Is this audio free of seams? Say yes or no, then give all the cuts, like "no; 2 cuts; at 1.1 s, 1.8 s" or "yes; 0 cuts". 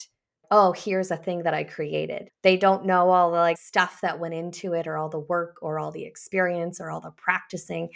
no; 2 cuts; at 2.2 s, 3.6 s